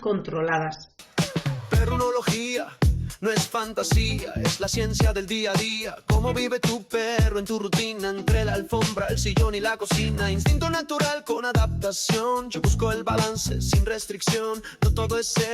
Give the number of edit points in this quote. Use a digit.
1